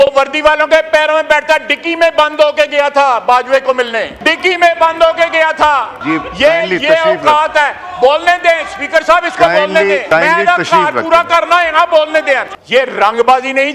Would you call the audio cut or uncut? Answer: cut